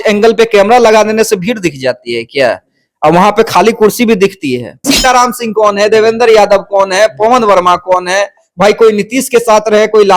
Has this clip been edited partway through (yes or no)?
yes